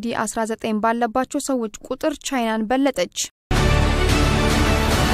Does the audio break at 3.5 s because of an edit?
yes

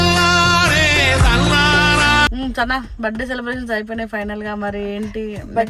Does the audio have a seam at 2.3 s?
yes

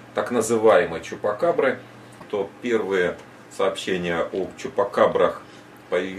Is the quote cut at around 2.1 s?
yes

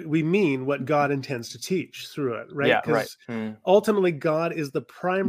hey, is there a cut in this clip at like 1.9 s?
no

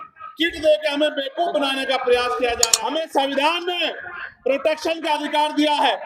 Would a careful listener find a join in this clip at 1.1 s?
no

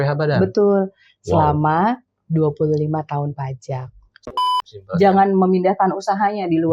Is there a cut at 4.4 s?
yes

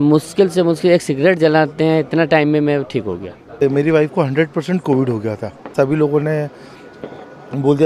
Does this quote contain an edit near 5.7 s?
yes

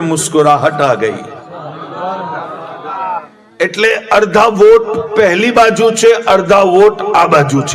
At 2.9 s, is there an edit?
yes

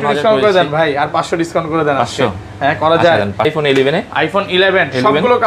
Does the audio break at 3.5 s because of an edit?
yes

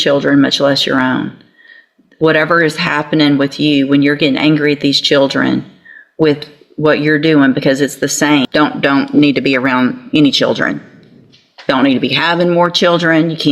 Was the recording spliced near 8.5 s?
yes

